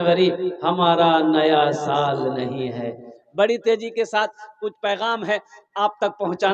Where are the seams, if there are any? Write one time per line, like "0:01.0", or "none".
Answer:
none